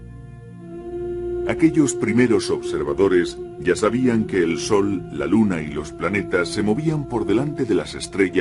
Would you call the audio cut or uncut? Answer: uncut